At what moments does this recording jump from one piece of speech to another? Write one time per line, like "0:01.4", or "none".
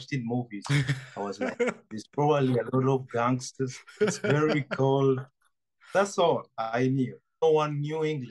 0:07.4